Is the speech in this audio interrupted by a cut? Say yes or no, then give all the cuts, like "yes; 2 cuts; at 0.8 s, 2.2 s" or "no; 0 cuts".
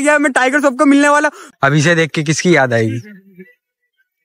yes; 1 cut; at 1.4 s